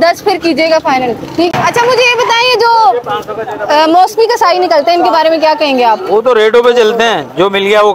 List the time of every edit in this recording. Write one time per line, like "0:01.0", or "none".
0:01.5